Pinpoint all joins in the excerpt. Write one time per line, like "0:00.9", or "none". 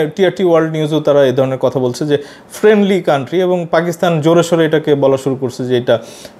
none